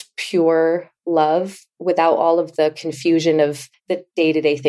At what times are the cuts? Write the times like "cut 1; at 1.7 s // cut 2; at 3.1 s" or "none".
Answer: cut 1; at 3.7 s